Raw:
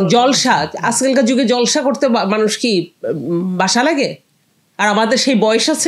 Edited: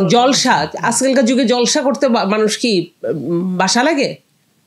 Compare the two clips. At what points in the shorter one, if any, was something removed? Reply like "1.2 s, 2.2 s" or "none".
none